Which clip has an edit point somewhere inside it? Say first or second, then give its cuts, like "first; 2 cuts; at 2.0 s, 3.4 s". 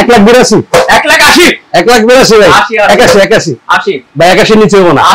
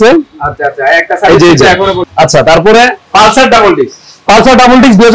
second; 1 cut; at 2.0 s